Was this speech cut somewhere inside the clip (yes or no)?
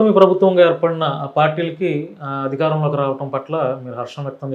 no